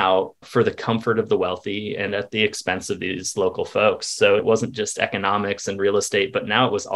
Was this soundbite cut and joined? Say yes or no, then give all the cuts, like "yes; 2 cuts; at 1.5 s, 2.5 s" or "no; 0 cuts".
yes; 1 cut; at 4.4 s